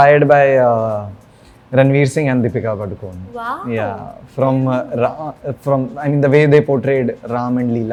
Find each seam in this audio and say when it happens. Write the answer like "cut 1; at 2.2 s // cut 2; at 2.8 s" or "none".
none